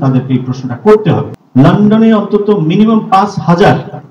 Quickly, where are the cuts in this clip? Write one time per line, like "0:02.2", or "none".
0:01.3